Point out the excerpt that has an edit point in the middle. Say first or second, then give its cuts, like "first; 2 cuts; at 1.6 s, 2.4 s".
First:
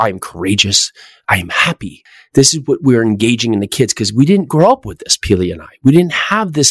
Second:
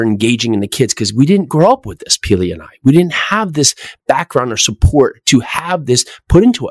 first; 1 cut; at 2.1 s